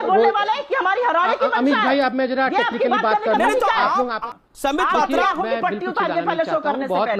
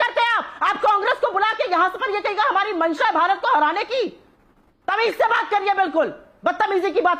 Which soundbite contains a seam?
first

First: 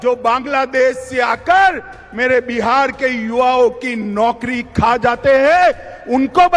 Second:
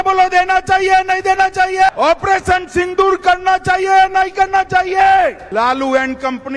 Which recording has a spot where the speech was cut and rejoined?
second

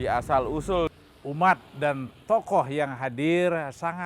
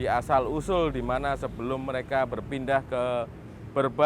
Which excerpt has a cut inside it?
first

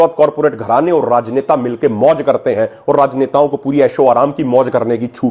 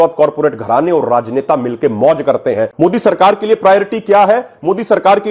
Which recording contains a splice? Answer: second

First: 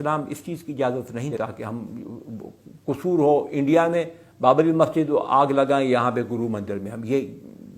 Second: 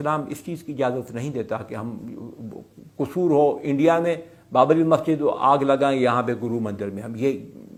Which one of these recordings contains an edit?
first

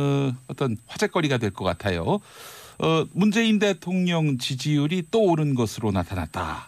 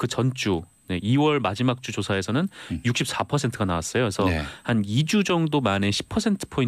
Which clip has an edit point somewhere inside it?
first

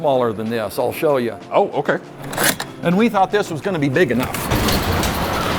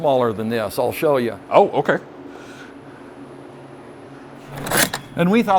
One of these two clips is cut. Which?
first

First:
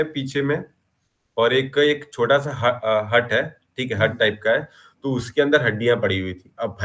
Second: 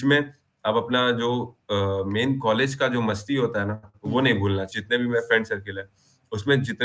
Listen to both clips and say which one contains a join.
second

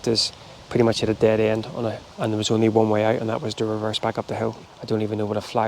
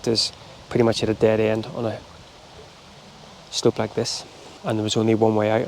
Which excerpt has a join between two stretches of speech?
first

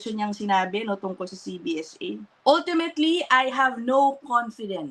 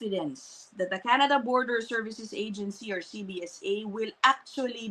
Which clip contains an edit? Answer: first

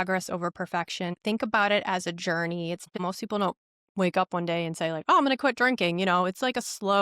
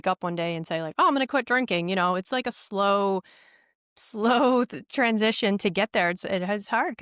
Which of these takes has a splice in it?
first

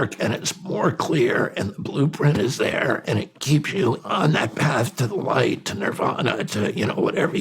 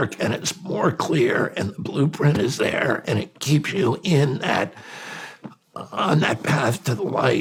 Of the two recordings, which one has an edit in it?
first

